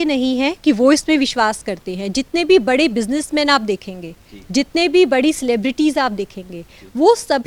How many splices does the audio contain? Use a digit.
0